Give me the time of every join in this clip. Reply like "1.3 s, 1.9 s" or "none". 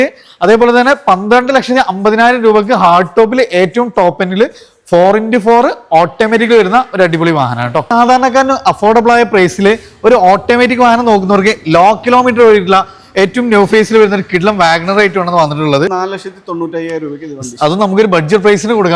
7.9 s, 15.9 s